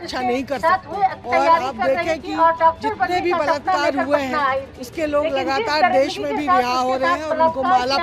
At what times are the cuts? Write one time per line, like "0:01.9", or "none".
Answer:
0:01.2